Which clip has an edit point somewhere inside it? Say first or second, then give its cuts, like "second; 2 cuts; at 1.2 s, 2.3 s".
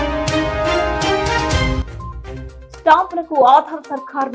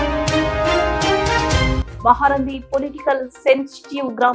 second; 1 cut; at 1.8 s